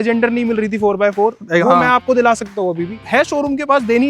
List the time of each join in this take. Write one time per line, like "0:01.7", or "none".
0:02.9